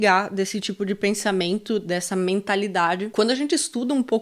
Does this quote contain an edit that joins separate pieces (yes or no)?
yes